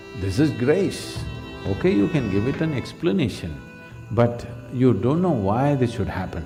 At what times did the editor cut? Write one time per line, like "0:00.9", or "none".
none